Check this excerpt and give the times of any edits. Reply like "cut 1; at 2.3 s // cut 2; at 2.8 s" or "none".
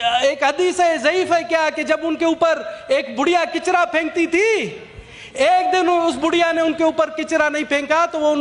none